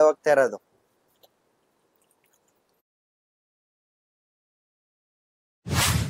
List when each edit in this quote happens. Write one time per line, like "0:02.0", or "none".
none